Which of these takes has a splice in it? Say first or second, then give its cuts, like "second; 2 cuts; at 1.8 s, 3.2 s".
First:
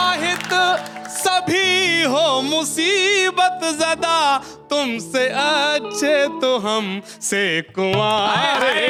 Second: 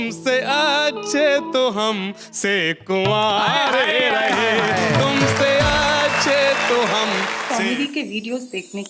second; 1 cut; at 7.4 s